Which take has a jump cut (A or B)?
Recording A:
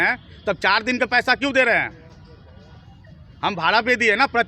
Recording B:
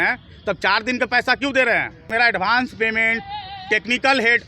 B